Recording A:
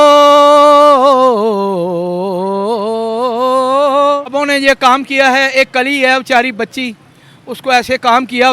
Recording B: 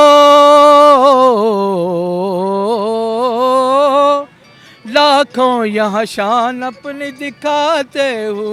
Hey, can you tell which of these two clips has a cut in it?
A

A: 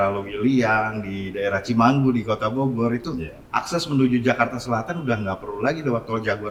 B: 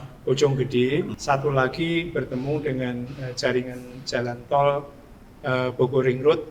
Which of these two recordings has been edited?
B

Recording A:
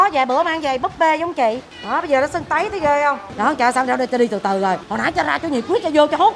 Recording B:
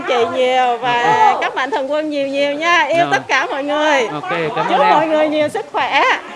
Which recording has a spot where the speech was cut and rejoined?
A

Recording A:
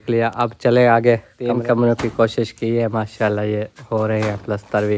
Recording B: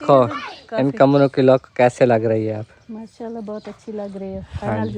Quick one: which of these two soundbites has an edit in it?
A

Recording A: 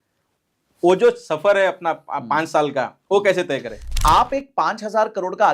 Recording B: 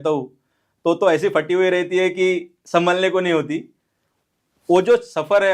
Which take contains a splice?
A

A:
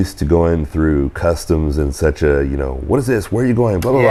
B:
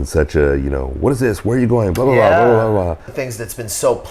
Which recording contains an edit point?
B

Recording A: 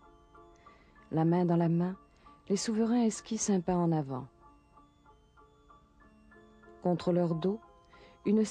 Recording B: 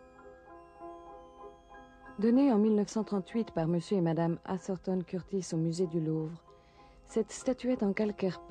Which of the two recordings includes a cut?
A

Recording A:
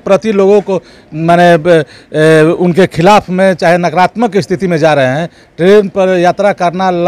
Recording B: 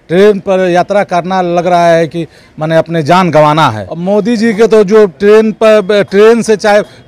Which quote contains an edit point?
B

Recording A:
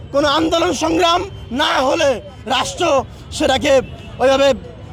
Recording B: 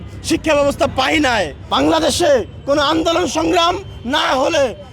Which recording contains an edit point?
B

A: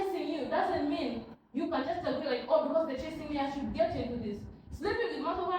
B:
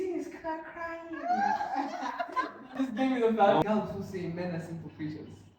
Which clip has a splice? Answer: B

